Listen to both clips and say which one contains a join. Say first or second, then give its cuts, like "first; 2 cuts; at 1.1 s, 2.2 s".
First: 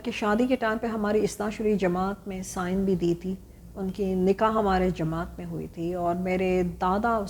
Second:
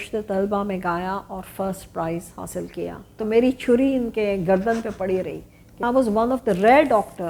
second; 2 cuts; at 3.2 s, 5.8 s